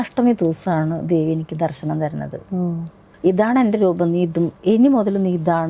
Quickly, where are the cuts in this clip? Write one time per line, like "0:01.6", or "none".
0:03.0